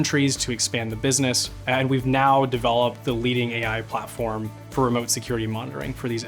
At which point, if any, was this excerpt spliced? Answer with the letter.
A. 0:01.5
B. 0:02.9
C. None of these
A